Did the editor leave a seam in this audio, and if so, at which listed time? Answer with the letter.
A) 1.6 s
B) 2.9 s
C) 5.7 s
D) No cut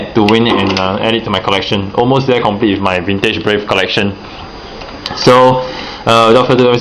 B